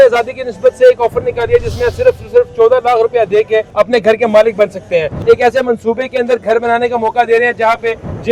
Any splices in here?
yes; 2 cuts; at 3.7 s, 5.1 s

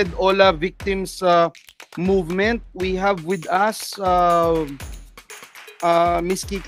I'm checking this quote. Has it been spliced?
no; 0 cuts

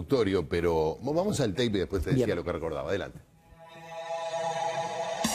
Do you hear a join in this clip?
no; 0 cuts

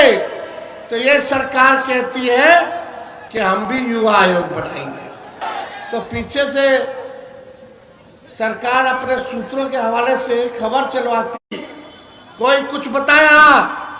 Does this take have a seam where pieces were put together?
yes; 1 cut; at 5.4 s

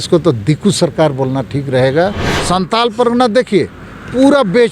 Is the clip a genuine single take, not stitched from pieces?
no; 1 cut; at 2.3 s

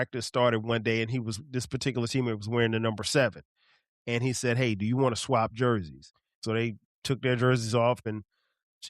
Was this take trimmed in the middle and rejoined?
yes; 2 cuts; at 6.4 s, 8.0 s

